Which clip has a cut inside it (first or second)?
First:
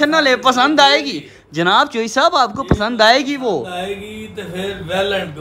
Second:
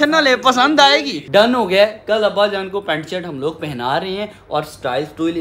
second